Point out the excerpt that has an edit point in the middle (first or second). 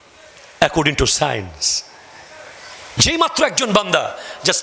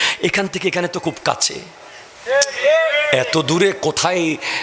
second